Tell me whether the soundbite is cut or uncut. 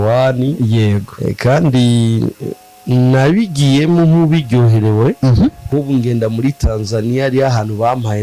cut